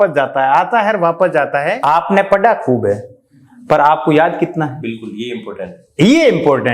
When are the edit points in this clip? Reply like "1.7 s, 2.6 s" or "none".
1.8 s

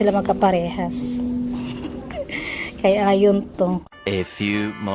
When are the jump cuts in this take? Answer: 3.9 s

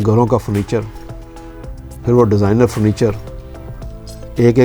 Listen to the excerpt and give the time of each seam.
none

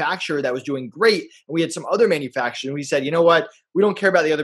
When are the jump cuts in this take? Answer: none

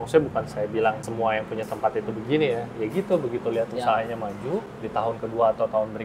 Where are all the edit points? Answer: 1.1 s, 4.8 s

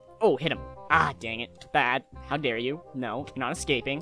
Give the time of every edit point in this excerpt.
1.6 s

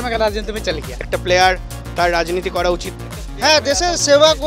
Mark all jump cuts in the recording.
1.1 s

